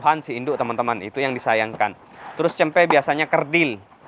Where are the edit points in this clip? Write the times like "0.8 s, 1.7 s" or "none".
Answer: none